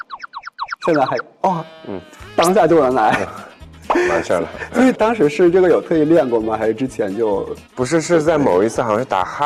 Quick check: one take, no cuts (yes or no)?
yes